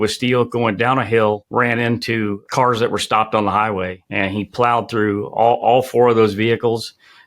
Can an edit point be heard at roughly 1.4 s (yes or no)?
yes